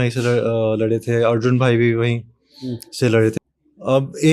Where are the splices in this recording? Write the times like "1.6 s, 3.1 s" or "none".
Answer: 3.3 s